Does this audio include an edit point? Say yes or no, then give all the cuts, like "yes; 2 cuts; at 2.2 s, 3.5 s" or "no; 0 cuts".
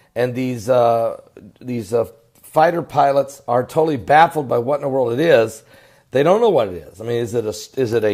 no; 0 cuts